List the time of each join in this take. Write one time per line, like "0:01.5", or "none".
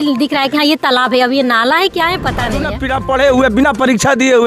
0:02.7